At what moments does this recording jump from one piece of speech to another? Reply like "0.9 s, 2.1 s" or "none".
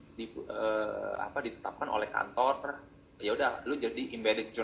none